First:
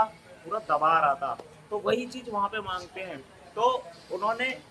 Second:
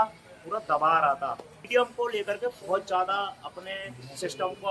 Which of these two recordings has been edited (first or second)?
second